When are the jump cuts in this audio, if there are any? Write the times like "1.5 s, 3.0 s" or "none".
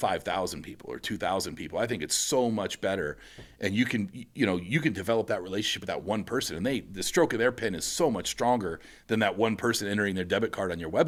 none